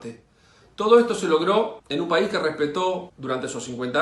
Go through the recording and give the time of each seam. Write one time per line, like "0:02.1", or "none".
0:01.8
0:03.1